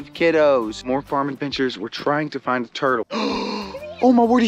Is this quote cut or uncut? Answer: cut